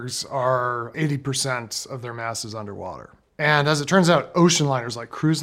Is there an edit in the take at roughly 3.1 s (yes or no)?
yes